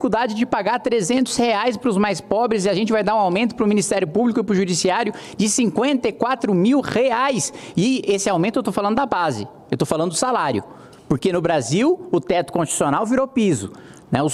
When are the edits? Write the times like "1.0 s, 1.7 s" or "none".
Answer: none